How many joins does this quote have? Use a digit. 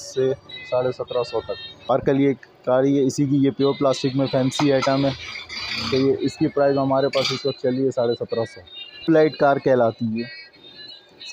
2